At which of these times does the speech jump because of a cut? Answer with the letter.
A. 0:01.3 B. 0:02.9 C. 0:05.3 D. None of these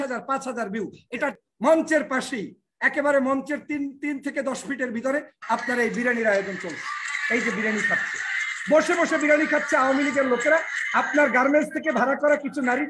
A